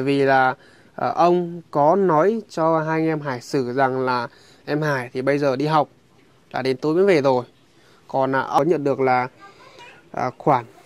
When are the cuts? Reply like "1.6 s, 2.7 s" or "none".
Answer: 8.6 s

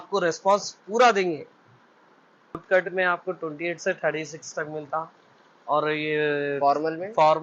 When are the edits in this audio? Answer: 2.5 s

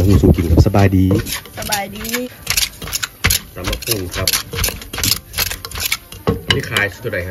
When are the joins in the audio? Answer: 2.3 s

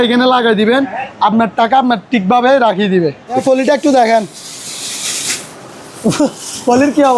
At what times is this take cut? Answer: 3.4 s

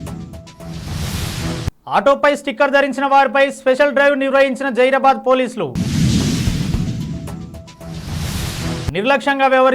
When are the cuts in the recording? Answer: 1.7 s

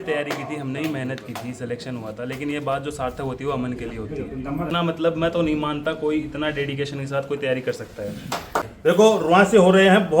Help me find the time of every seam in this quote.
4.7 s, 8.9 s

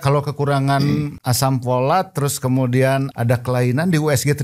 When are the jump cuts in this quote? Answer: 1.2 s, 3.1 s

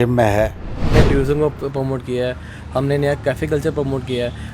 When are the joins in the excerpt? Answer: 0.9 s

